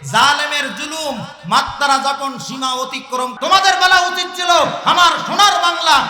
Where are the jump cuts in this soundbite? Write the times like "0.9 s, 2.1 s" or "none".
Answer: 3.3 s